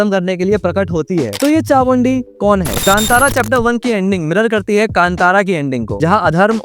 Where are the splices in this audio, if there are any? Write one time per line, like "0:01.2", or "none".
0:01.3
0:02.7